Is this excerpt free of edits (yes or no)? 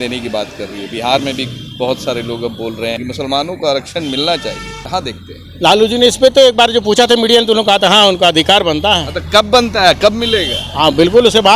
yes